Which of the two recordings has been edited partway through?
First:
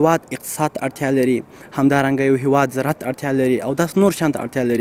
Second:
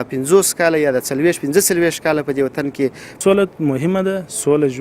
second; 1 cut; at 3.2 s

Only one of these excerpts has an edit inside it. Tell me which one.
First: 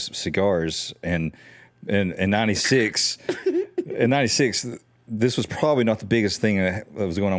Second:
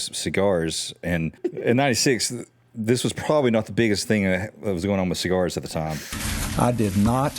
second; 1 cut; at 1.4 s

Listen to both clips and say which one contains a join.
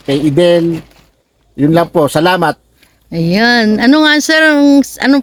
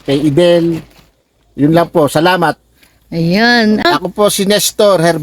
second; 1 cut; at 3.8 s

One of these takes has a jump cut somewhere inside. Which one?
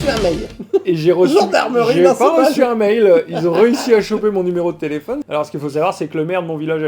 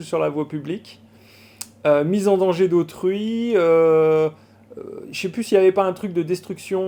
first; 1 cut; at 5.2 s

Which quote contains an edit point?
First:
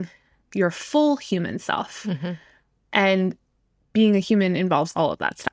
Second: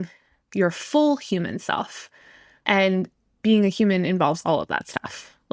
second; 2 cuts; at 2.0 s, 3.2 s

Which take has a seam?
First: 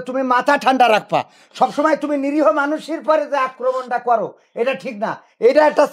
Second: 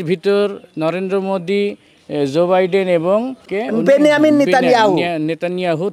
second; 1 cut; at 3.4 s

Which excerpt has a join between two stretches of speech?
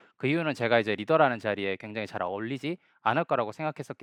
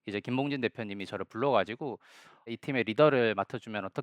second; 1 cut; at 2.5 s

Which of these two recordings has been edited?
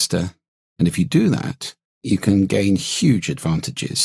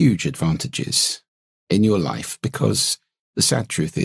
first; 1 cut; at 1.9 s

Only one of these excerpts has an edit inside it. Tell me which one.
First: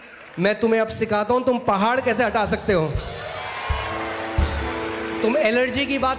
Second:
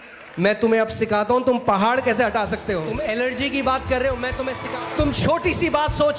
second; 2 cuts; at 2.9 s, 4.6 s

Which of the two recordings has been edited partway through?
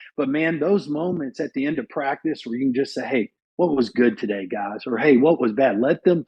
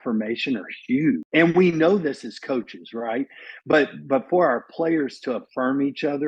second; 1 cut; at 1.2 s

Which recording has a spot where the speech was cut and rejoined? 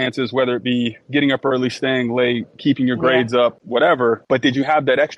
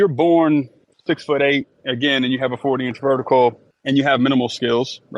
first; 1 cut; at 3.9 s

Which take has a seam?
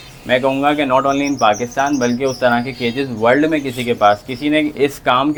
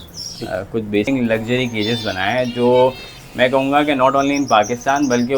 second; 1 cut; at 1.1 s

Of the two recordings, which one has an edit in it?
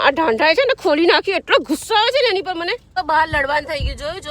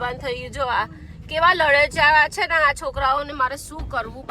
first; 1 cut; at 2.8 s

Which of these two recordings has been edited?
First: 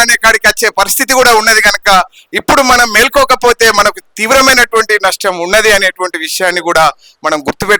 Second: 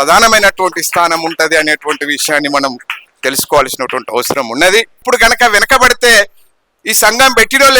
second; 1 cut; at 5.0 s

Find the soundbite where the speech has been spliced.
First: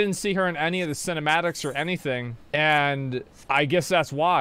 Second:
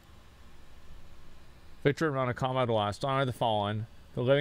first; 2 cuts; at 2.4 s, 3.3 s

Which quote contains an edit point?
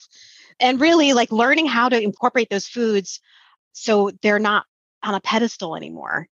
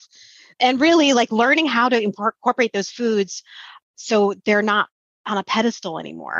first; 1 cut; at 2.1 s

